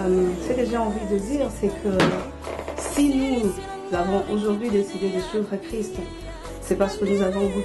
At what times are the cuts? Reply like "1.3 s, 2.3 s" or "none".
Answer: none